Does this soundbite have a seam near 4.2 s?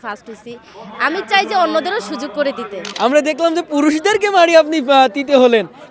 no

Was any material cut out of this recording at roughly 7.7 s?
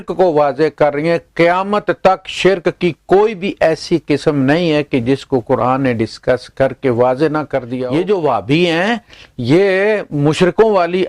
yes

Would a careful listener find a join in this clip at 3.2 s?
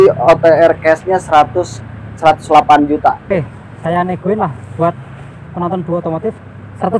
yes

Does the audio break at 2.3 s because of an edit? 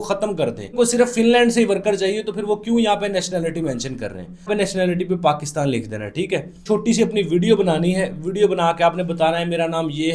no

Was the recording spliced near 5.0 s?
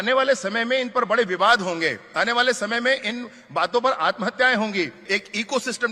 yes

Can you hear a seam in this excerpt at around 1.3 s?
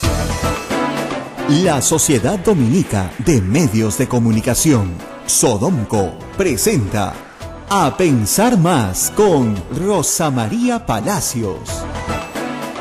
yes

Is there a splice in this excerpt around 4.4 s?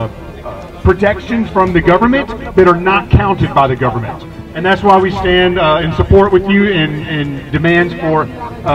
yes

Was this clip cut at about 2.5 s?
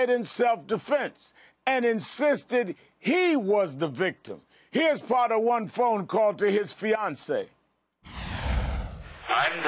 yes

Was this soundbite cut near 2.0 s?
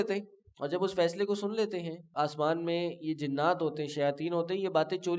yes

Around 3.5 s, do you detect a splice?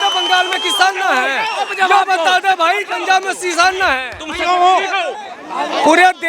no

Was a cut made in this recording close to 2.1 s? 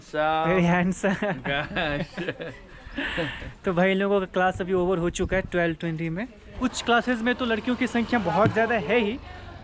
no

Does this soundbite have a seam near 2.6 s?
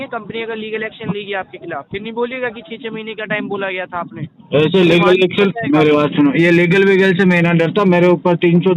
no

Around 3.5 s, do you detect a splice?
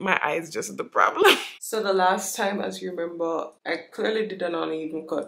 yes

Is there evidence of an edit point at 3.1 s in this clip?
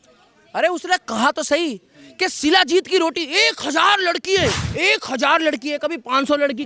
no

